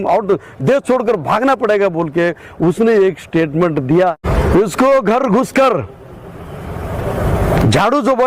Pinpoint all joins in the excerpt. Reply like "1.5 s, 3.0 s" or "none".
4.1 s